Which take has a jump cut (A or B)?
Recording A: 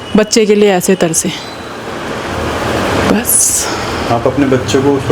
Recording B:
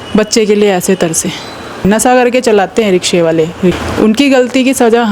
B